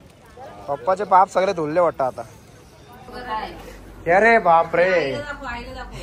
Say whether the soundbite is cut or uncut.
cut